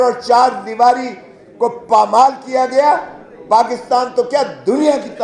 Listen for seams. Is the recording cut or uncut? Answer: uncut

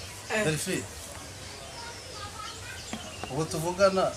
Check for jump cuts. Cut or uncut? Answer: uncut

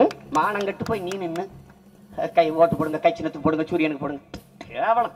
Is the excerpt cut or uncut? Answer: uncut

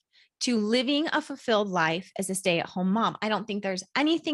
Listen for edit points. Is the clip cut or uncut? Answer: uncut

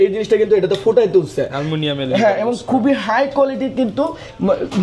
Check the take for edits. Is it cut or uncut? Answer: uncut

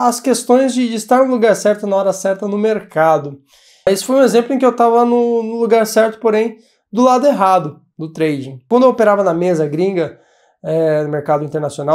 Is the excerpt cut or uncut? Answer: cut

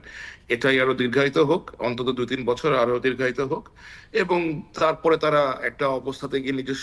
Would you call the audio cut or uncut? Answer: uncut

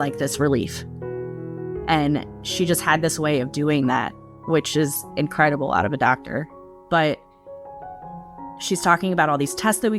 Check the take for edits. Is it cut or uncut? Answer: uncut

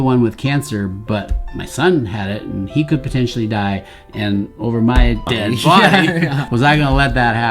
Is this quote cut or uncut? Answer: cut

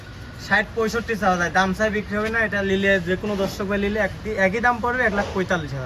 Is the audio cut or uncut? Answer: uncut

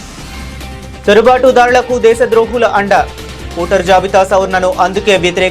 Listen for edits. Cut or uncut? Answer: uncut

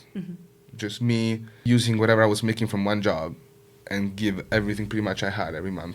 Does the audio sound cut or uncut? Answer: cut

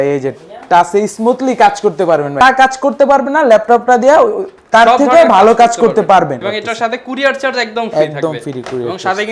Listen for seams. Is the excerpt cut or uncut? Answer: cut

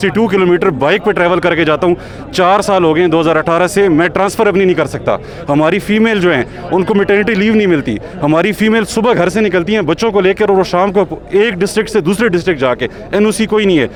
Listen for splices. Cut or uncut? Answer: uncut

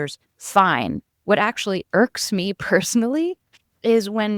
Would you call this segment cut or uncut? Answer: uncut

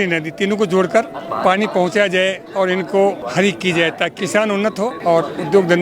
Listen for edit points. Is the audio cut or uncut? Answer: cut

